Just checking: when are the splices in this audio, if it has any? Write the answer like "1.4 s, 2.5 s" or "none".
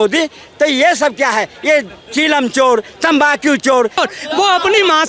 4.0 s